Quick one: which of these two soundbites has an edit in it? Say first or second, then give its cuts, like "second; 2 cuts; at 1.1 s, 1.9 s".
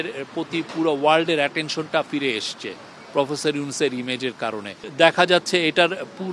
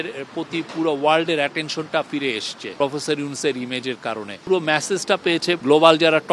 second; 3 cuts; at 2.6 s, 4.3 s, 5.6 s